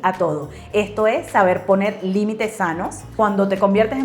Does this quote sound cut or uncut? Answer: cut